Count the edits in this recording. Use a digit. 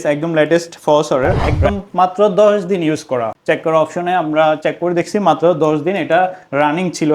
2